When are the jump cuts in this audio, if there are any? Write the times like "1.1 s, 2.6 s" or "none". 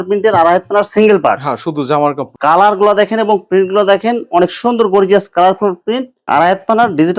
2.3 s, 6.1 s